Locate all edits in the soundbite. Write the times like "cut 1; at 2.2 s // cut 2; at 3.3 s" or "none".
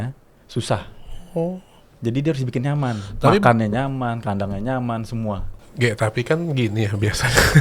cut 1; at 5.5 s